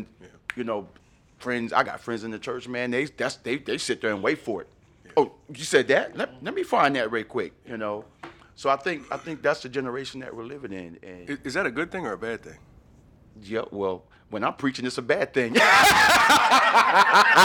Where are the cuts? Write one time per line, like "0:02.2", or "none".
0:01.0